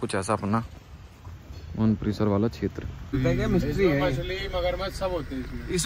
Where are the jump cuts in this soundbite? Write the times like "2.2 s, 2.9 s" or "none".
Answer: 3.2 s

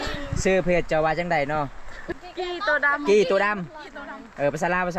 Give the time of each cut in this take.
2.0 s

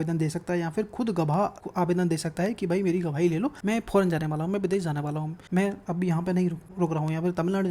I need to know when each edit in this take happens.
1.6 s, 3.6 s, 5.3 s, 6.6 s

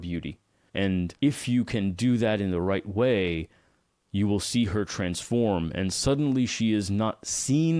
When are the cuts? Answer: 1.1 s

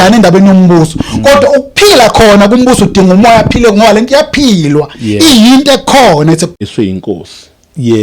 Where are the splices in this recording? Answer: 6.6 s

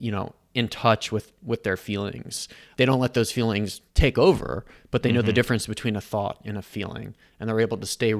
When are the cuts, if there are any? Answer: none

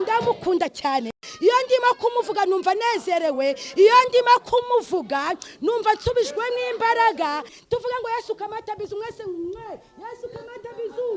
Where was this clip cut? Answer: 1.2 s, 7.5 s

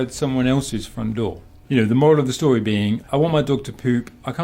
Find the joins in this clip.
1.5 s, 3.1 s

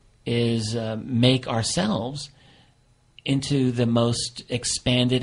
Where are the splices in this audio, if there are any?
2.3 s

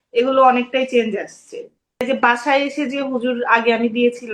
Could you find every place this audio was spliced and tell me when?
2.0 s

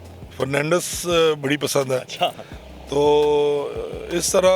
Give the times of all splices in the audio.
none

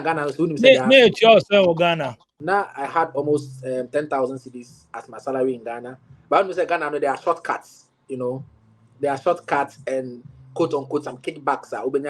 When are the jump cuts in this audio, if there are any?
2.4 s

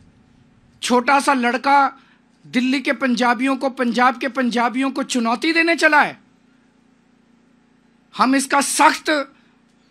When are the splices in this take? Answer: none

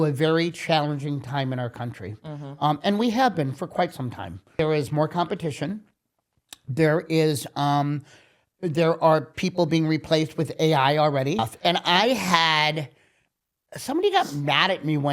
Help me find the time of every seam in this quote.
4.5 s, 11.5 s

